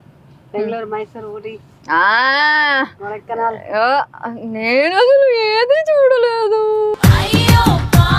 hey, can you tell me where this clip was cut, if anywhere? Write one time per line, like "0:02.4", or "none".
none